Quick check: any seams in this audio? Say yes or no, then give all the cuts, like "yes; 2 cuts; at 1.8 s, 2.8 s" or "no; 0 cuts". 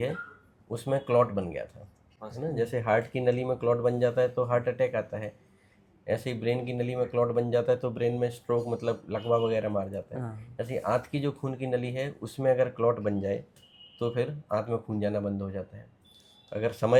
no; 0 cuts